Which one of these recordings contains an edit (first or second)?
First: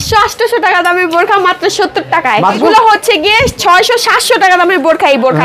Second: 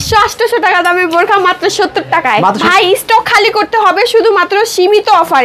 first